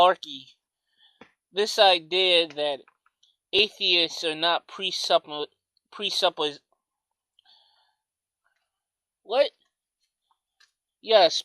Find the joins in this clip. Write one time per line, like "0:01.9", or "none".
0:10.4